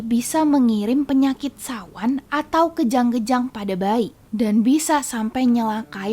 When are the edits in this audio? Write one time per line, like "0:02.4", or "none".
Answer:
0:04.2

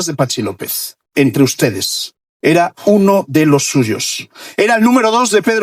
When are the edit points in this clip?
none

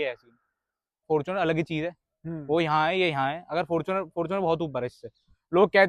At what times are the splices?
0:00.9

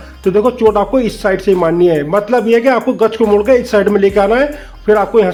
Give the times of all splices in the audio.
none

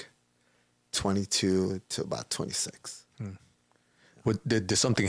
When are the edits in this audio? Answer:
none

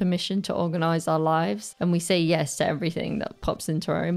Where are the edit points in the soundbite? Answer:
0:01.7

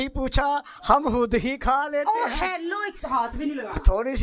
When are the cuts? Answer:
0:03.0

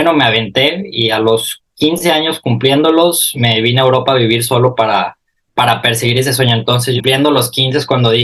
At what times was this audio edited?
0:07.0

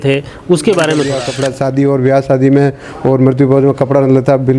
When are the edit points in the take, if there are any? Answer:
0:01.3

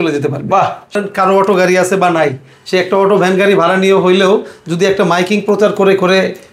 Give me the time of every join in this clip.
0:00.9

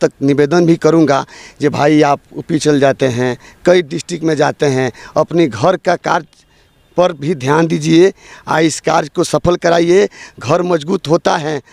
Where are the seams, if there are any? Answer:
none

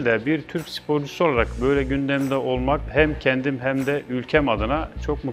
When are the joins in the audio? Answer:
0:02.9

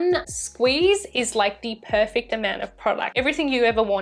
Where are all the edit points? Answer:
0:03.1

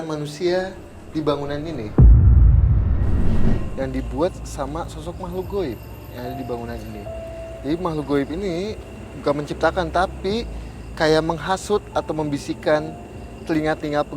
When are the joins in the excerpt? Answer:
0:03.7

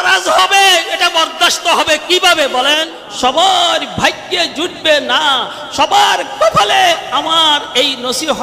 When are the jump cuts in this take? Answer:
0:03.0

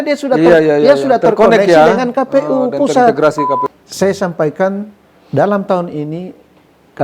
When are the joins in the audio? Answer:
0:03.7

